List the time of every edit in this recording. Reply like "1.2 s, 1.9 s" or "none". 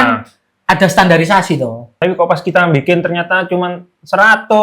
1.9 s

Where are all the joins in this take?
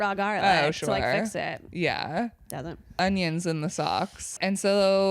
3.0 s, 4.3 s

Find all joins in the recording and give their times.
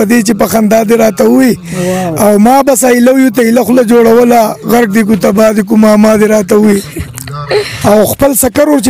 7.7 s

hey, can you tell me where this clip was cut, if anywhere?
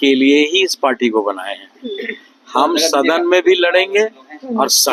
none

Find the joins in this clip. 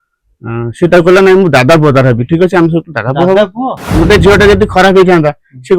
3.9 s

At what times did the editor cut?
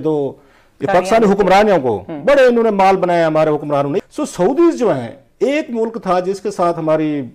4.1 s

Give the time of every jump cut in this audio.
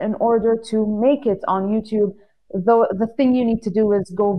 none

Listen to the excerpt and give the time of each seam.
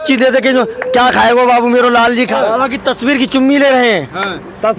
2.4 s

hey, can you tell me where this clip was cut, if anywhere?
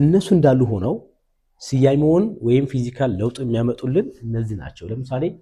none

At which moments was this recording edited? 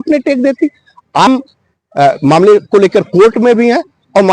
1.3 s

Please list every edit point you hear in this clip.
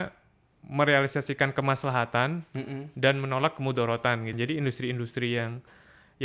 4.3 s

